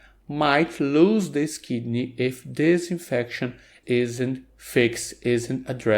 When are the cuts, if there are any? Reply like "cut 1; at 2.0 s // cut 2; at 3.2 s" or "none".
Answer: cut 1; at 3.8 s